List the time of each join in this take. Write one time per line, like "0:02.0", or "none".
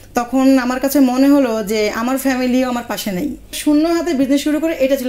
0:03.6

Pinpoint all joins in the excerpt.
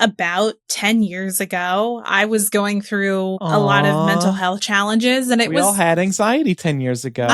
0:03.4

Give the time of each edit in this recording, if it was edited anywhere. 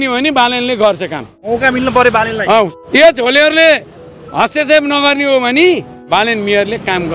0:01.4
0:02.7
0:05.9

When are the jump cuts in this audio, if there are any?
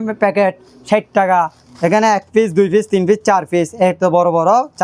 none

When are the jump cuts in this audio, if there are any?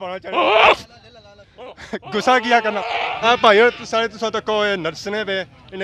0:03.1

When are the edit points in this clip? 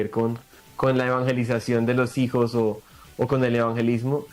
none

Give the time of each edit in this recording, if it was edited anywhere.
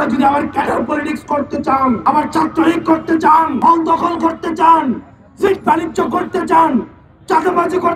0:02.0
0:03.5

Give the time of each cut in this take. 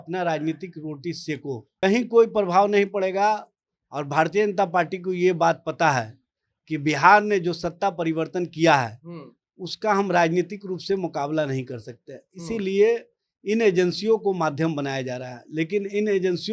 0:01.6

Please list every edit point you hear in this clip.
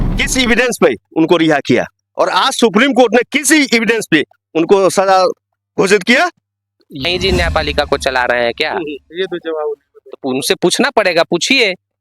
0:07.0

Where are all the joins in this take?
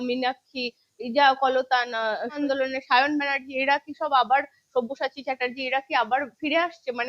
0:02.4

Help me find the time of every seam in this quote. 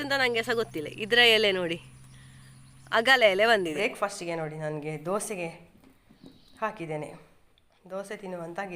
0:03.7

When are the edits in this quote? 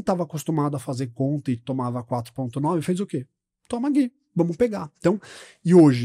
none

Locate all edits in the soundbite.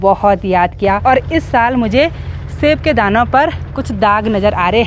0:01.0

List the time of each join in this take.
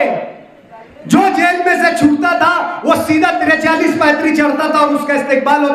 none

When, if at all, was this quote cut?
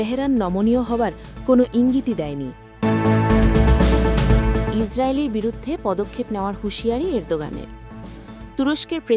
0:02.6
0:04.7

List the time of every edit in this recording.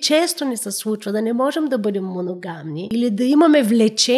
0:02.8

